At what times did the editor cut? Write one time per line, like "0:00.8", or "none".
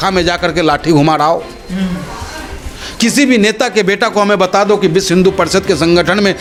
none